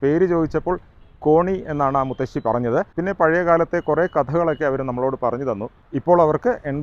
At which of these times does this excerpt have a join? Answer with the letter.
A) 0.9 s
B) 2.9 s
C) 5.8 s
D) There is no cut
C